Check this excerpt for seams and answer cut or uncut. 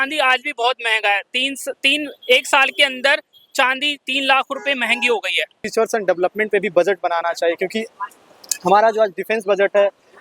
cut